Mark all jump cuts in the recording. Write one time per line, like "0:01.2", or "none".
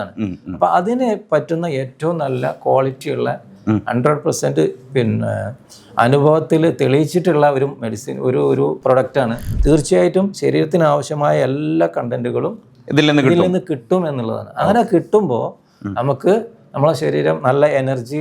0:09.5